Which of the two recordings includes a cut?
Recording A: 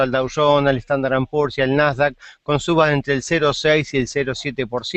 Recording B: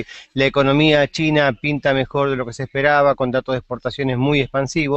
A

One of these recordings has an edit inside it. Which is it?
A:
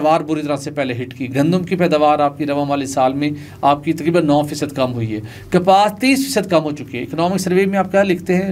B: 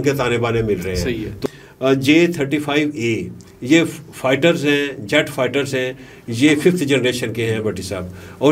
B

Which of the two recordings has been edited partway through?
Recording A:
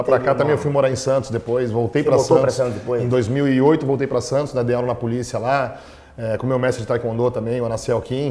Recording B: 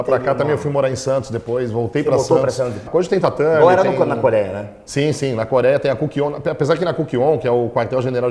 A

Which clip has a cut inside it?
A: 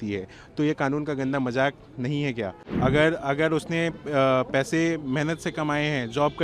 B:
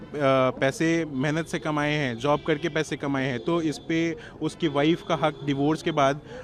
A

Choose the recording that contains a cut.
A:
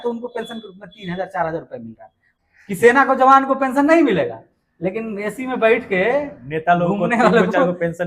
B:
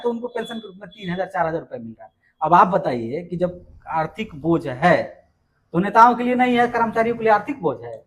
A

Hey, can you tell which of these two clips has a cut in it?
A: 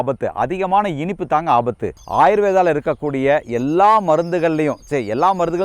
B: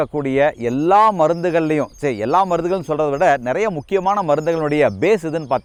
A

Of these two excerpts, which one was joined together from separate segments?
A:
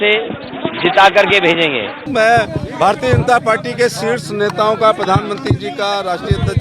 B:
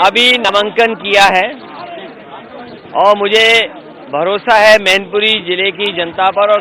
A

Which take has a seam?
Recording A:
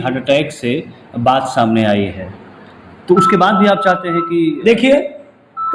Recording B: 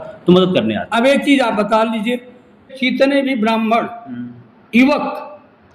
B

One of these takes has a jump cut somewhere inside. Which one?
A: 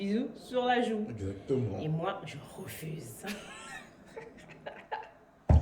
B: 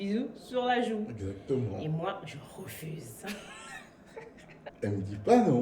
B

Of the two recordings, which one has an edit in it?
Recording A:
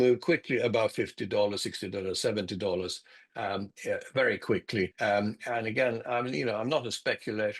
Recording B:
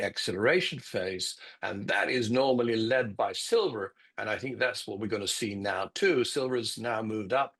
A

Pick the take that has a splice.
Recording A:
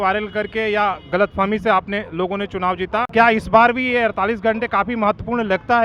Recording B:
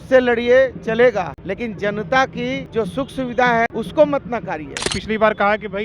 B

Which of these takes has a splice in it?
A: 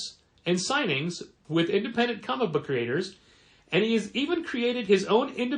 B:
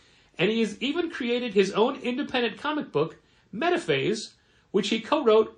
A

